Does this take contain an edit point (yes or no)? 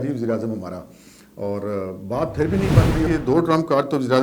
yes